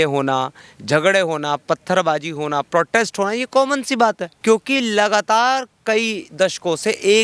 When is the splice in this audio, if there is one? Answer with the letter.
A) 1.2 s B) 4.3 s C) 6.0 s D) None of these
B